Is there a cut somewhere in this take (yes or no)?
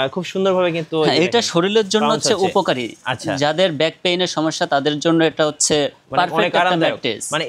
no